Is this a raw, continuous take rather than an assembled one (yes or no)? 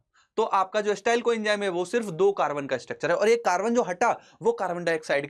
yes